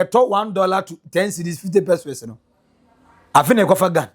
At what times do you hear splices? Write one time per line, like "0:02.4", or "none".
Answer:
none